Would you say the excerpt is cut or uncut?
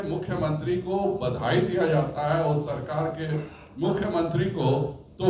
uncut